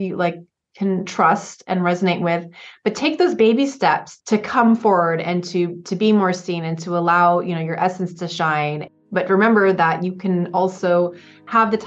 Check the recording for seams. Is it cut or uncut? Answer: cut